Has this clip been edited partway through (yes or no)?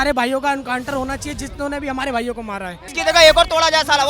yes